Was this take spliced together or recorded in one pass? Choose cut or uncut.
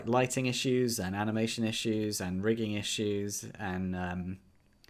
uncut